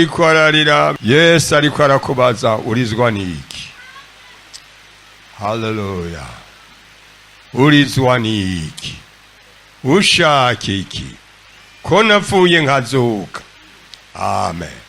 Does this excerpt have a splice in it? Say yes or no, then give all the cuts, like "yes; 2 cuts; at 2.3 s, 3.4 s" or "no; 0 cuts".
yes; 1 cut; at 0.9 s